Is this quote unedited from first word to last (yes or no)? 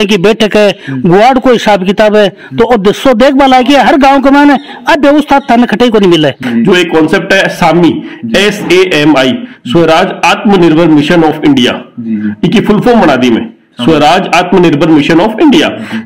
no